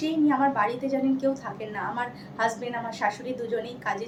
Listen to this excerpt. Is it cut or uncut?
uncut